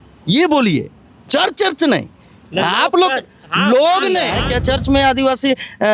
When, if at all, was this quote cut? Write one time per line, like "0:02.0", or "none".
0:04.4